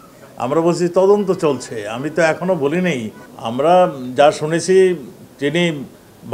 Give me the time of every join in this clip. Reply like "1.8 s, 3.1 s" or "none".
3.2 s